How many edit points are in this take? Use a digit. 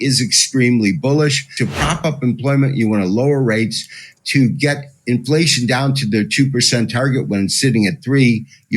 1